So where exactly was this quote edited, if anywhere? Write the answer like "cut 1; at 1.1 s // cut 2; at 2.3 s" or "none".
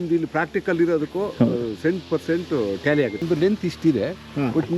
cut 1; at 3.2 s